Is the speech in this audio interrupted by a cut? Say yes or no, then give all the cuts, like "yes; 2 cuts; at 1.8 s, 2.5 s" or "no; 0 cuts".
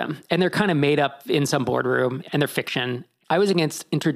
no; 0 cuts